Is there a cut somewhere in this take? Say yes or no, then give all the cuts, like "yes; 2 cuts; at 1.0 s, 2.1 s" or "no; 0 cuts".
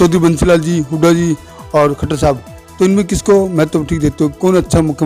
no; 0 cuts